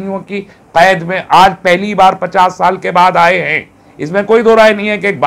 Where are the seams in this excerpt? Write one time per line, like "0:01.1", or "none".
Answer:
none

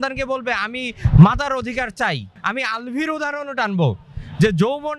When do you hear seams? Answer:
0:02.4

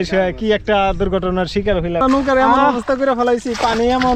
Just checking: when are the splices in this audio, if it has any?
0:02.0

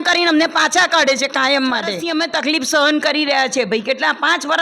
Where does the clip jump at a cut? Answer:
0:02.0

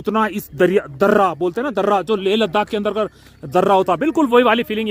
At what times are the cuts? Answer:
none

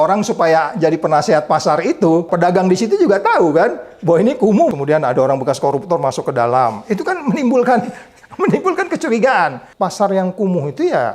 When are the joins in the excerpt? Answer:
0:02.3
0:04.7
0:09.6

